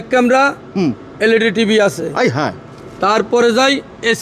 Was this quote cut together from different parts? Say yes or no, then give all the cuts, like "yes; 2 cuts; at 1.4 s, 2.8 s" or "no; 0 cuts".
no; 0 cuts